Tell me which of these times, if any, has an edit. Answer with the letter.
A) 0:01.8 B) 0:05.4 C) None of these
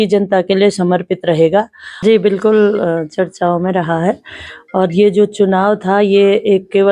A